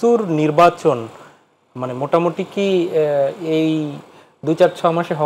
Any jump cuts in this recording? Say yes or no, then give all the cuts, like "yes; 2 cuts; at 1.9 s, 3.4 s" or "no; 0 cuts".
no; 0 cuts